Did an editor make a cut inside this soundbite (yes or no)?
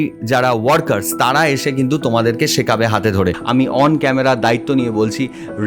yes